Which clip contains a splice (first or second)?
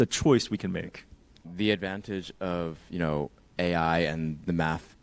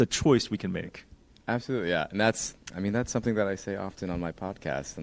first